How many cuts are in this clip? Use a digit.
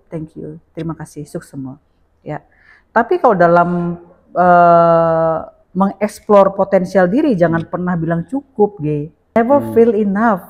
1